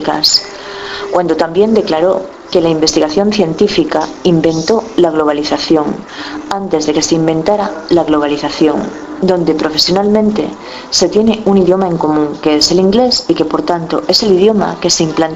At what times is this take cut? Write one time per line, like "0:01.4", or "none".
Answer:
none